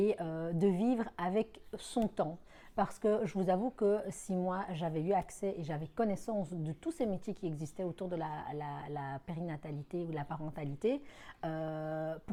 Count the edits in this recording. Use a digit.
0